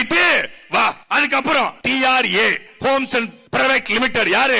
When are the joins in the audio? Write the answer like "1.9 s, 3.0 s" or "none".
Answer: 1.0 s, 1.8 s, 3.4 s

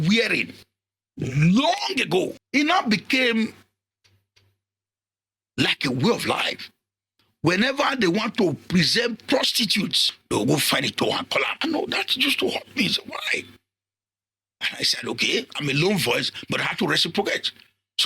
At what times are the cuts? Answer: 2.4 s, 10.1 s, 11.5 s

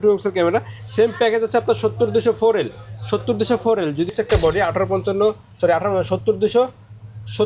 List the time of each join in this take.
4.1 s

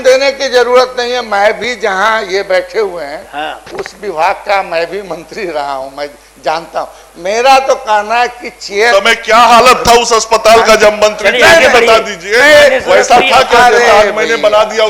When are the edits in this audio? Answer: none

